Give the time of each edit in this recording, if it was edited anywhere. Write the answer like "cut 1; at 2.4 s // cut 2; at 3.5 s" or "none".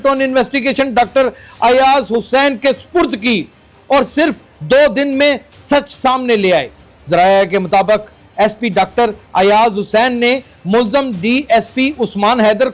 cut 1; at 3.7 s